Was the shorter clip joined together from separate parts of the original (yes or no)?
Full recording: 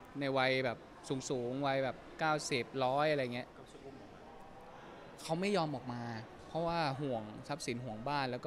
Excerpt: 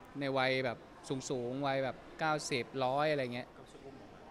no